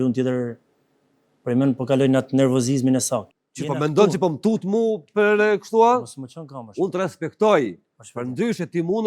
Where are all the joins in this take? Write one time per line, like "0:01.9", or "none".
0:03.3